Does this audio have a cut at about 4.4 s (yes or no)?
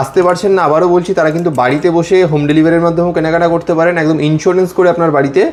no